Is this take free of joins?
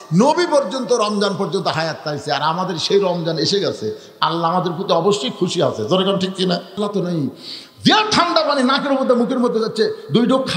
no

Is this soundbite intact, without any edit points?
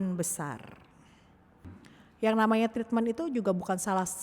no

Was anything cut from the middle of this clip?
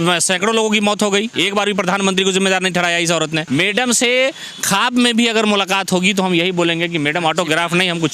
yes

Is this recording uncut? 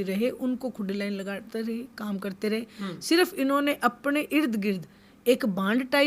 yes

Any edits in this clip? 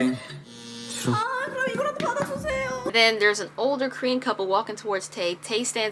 yes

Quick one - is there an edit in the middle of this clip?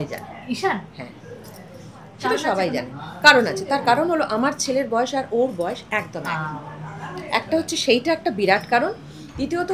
no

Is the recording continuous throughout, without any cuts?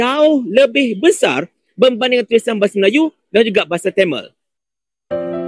no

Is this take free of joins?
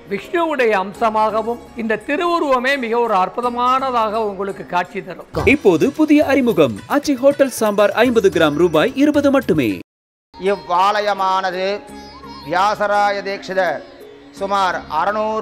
no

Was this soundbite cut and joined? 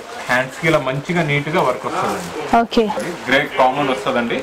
yes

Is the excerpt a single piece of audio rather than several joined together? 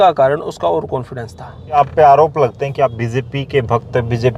no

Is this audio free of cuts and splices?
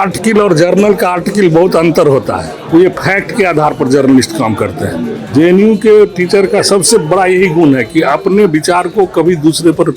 no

